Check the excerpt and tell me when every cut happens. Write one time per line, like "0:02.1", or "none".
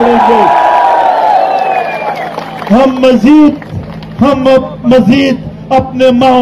none